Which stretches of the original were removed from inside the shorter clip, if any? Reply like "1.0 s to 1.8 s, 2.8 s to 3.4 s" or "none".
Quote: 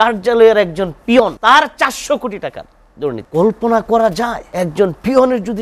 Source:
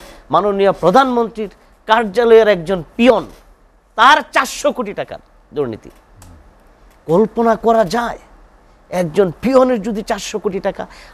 3.3 s to 3.9 s, 5.8 s to 7.0 s, 8.2 s to 8.8 s